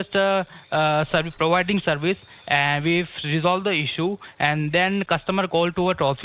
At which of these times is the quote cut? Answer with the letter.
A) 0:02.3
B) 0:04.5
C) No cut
C